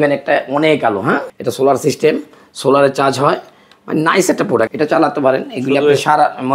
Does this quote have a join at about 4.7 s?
yes; 2 cuts; at 1.3 s, 4.7 s

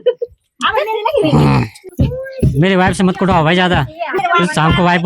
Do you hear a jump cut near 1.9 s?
yes; 1 cut; at 1.9 s

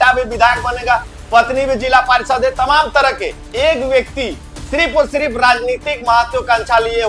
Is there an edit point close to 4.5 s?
no; 0 cuts

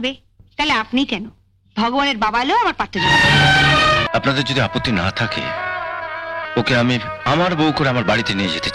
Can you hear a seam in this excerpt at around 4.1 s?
yes; 1 cut; at 4.1 s

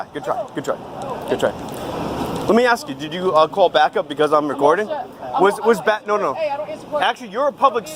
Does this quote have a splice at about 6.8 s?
no; 0 cuts

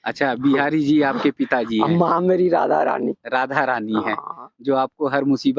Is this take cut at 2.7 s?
no; 0 cuts

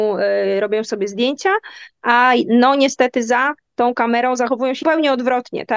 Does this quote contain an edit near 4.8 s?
yes; 1 cut; at 4.8 s

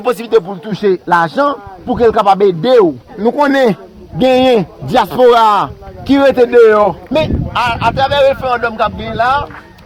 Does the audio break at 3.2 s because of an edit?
yes; 2 cuts; at 3.2 s, 7.0 s

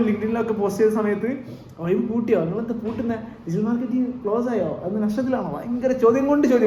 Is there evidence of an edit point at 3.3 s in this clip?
no; 0 cuts

